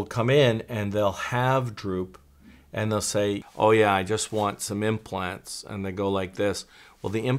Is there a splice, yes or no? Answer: yes